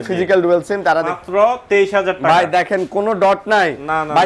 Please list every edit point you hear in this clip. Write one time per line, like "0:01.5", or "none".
0:01.2